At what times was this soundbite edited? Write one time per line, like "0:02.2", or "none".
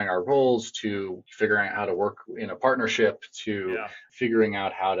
0:01.2
0:04.0